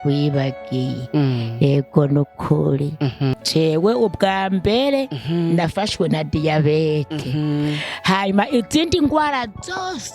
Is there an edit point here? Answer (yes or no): yes